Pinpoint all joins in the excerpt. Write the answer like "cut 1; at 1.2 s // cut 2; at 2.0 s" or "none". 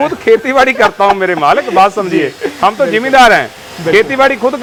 none